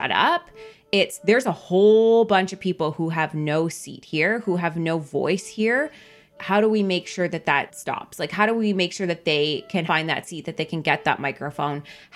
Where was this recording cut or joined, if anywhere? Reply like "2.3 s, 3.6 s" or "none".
6.3 s, 7.8 s, 9.8 s

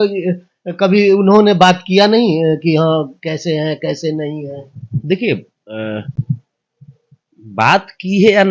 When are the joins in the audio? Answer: none

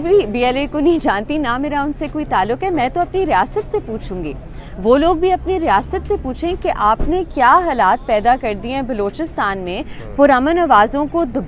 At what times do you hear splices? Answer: none

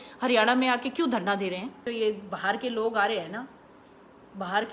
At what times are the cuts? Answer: 1.8 s

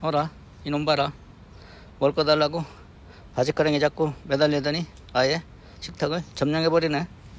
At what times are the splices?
none

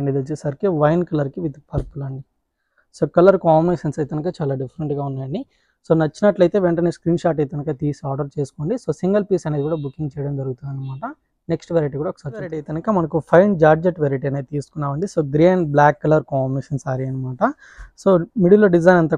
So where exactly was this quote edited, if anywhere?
none

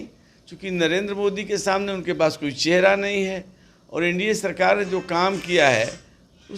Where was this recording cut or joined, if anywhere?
none

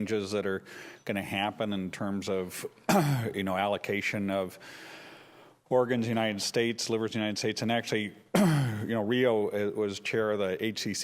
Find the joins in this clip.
1.7 s

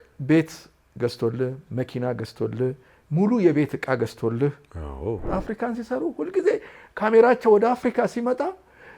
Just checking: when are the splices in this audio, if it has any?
5.2 s

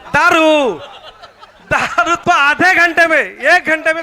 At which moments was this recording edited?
2.2 s

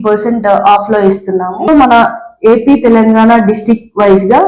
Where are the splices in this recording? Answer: 1.7 s

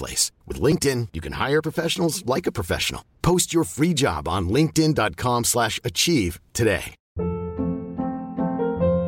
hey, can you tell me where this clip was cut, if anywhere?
7.0 s

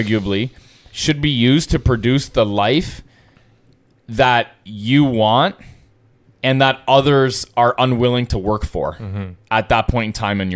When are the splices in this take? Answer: none

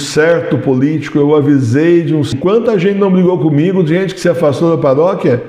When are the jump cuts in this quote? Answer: 2.4 s

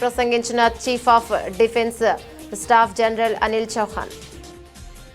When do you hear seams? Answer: 4.1 s

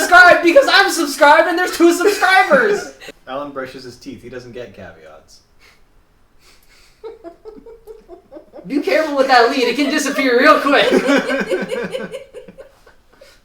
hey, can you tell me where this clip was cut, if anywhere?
3.0 s

